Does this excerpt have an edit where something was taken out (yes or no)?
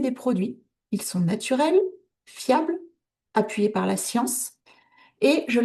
no